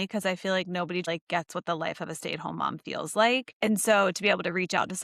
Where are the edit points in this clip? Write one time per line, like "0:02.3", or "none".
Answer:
0:01.1
0:03.5